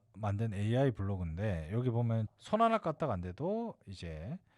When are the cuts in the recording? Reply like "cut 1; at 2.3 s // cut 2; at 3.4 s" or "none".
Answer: cut 1; at 2.3 s